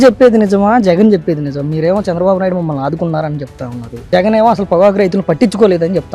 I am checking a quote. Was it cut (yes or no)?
no